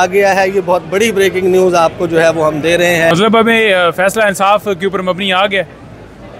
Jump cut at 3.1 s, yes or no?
yes